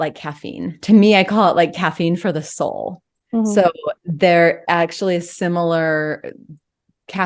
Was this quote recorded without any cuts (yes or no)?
yes